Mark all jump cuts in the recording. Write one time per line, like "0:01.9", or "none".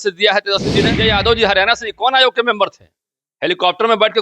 0:00.9